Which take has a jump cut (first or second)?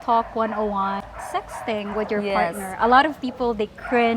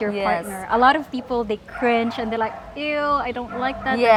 first